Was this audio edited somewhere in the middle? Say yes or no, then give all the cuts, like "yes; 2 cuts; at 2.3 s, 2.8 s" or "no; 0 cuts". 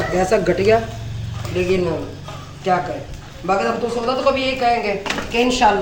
no; 0 cuts